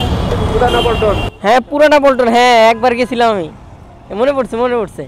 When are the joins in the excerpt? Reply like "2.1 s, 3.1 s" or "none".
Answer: none